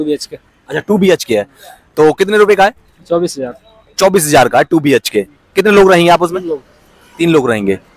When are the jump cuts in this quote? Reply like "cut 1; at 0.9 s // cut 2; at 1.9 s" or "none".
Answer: none